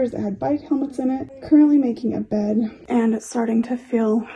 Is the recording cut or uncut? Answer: uncut